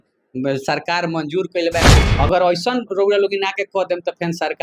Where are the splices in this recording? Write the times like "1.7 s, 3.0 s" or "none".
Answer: 1.9 s